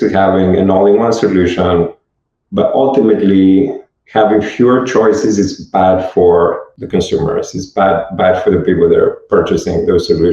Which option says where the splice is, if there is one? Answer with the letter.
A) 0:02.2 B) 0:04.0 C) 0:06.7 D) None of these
C